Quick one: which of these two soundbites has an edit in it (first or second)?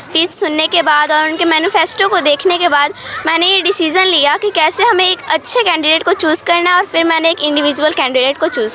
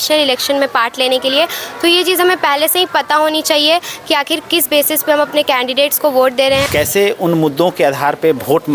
second